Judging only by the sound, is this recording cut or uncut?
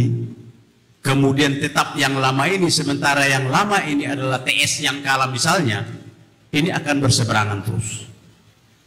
uncut